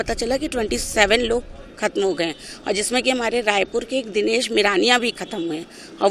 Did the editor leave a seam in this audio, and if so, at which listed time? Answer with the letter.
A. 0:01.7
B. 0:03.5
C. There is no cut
C